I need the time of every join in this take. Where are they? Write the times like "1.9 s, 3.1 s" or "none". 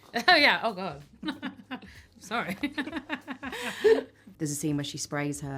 4.3 s